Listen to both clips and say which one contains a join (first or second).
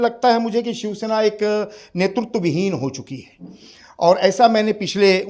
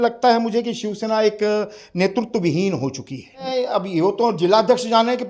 second